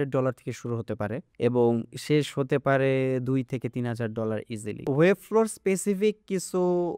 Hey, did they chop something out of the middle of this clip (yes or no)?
yes